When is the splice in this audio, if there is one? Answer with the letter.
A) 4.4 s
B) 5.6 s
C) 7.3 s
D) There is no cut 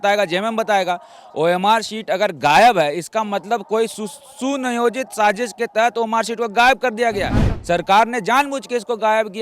C